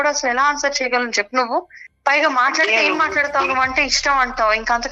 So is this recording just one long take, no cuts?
yes; 0 cuts

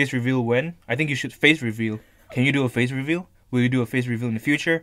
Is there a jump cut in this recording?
no; 0 cuts

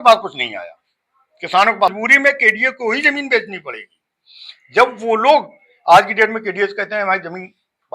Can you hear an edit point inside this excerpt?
yes; 1 cut; at 1.9 s

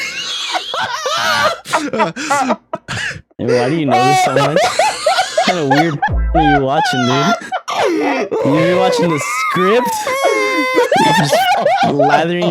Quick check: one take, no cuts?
yes; 0 cuts

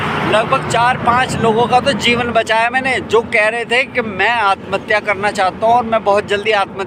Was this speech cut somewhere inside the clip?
no; 0 cuts

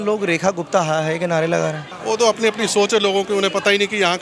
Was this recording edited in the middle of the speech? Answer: yes; 1 cut; at 1.9 s

